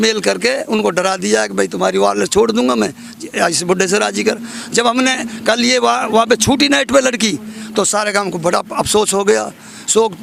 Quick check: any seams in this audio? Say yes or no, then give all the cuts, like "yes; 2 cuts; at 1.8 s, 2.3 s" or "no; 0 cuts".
no; 0 cuts